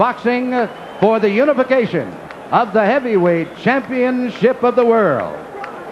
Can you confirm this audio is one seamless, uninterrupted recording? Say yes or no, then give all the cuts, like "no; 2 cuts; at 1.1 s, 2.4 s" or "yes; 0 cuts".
no; 1 cut; at 1.1 s